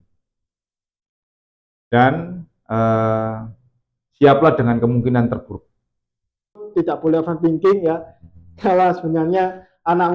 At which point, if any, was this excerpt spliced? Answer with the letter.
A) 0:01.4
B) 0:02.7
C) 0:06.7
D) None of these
C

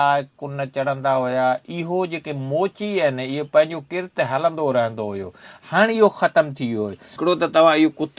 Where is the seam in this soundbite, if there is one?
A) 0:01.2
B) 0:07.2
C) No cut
B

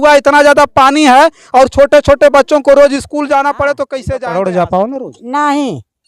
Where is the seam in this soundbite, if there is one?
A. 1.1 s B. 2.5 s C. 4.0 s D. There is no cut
C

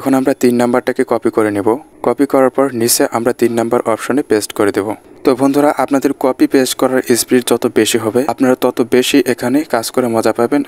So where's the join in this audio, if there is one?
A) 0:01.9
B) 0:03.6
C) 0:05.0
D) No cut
C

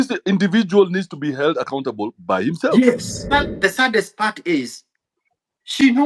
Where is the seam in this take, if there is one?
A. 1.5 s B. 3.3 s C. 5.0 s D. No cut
B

